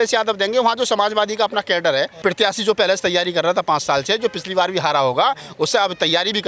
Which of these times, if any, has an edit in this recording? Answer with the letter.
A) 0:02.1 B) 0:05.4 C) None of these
A